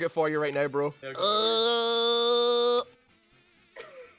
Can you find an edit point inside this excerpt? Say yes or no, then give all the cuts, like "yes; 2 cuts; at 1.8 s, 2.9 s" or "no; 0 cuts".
yes; 1 cut; at 1.0 s